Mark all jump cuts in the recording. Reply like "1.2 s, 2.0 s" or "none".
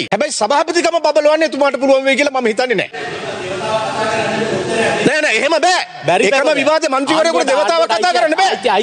2.9 s